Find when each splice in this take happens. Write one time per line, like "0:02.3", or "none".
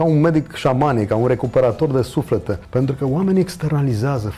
0:02.6